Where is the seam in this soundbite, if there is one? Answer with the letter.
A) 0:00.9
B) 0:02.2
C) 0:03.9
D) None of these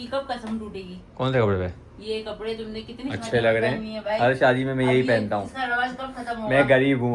C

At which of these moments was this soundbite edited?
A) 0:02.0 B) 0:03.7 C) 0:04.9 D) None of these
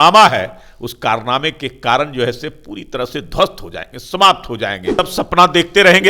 C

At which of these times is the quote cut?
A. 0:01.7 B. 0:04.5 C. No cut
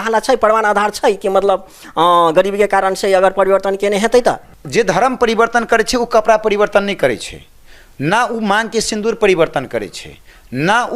B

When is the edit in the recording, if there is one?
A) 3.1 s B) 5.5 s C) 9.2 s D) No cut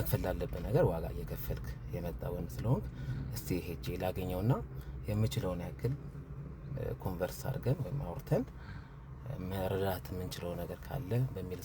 D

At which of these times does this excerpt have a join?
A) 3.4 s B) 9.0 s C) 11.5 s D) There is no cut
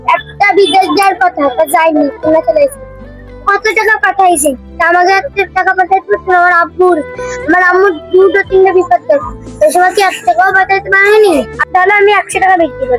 C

